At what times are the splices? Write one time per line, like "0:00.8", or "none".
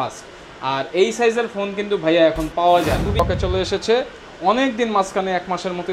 0:03.2